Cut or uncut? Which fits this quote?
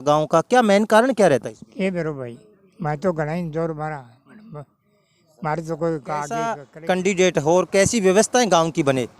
cut